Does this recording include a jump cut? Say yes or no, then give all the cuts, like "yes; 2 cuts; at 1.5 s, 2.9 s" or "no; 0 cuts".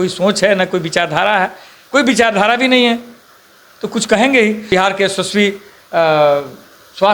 yes; 1 cut; at 4.7 s